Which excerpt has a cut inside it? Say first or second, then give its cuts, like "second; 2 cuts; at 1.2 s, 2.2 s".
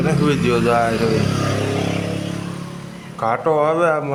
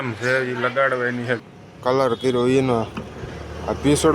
second; 1 cut; at 1.5 s